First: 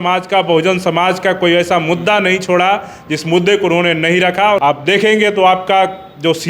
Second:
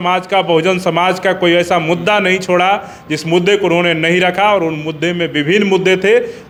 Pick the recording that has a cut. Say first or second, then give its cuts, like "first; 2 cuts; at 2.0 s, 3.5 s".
first; 1 cut; at 4.6 s